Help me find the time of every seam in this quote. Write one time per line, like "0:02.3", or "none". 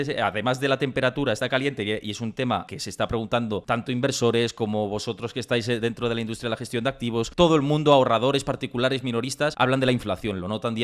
0:01.4
0:07.3